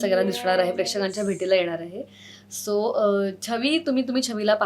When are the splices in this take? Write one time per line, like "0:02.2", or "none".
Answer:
none